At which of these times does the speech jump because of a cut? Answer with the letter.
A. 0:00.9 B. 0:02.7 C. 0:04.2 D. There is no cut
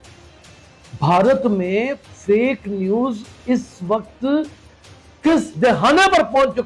A